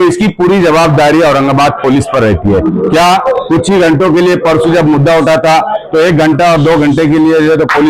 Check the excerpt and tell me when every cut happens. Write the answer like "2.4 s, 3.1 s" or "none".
none